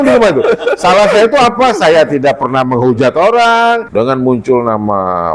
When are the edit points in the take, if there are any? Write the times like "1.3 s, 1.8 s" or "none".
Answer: 3.9 s